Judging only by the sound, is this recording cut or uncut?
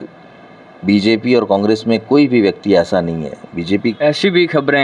cut